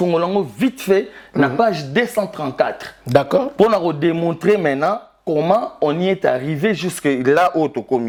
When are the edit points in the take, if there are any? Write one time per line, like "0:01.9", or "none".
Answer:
none